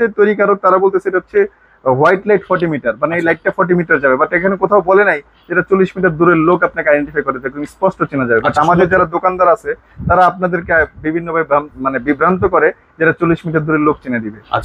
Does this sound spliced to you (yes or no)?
no